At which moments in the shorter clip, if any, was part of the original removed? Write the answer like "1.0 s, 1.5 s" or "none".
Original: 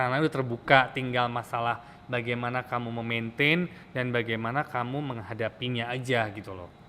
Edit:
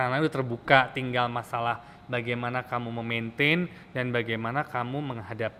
none